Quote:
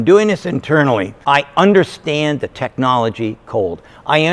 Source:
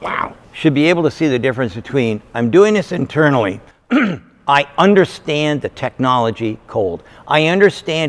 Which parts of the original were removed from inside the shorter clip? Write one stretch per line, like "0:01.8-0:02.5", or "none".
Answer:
0:03.6-0:04.3